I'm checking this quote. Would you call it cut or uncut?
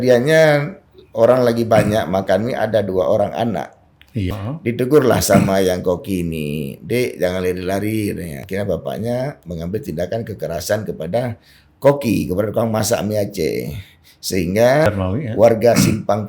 cut